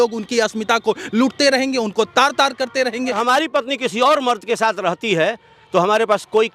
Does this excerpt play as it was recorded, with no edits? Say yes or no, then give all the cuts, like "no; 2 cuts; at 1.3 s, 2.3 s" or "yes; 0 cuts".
no; 1 cut; at 3.2 s